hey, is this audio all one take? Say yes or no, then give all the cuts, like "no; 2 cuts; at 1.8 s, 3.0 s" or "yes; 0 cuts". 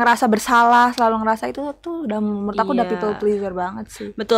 yes; 0 cuts